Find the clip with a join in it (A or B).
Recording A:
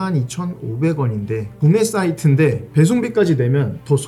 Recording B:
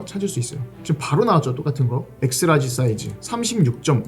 B